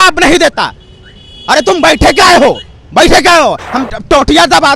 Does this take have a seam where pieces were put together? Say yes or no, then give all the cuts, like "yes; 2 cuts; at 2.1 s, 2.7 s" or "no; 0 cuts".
yes; 1 cut; at 3.7 s